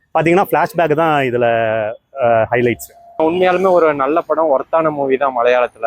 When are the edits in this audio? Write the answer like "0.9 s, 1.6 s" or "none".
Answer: 3.2 s